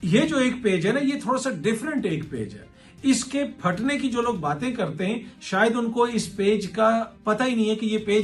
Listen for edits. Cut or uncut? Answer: uncut